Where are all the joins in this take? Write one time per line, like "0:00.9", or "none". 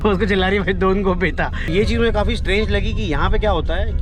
0:01.7